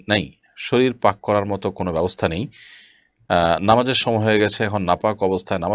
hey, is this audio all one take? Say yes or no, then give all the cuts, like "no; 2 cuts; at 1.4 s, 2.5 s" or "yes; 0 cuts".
yes; 0 cuts